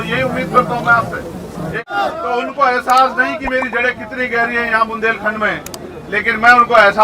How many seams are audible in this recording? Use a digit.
1